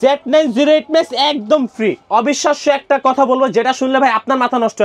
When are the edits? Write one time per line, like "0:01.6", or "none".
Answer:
0:02.1